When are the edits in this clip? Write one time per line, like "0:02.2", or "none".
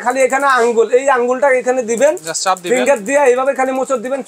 none